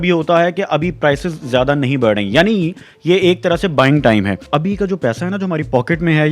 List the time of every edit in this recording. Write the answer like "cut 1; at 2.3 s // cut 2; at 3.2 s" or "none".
cut 1; at 4.4 s